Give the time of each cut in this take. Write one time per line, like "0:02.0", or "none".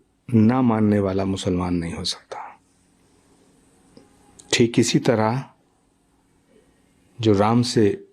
none